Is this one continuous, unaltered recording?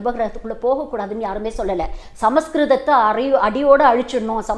yes; 0 cuts

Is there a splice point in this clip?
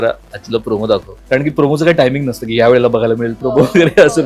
yes; 1 cut; at 1.1 s

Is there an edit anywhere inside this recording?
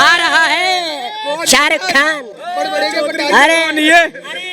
no; 0 cuts

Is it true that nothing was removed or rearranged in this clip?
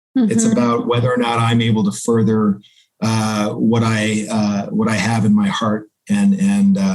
yes; 0 cuts

